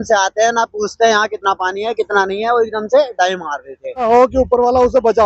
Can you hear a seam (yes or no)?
yes